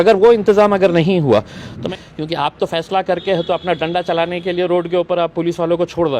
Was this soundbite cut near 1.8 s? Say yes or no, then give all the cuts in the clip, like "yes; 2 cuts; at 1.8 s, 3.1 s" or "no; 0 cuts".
yes; 1 cut; at 1.8 s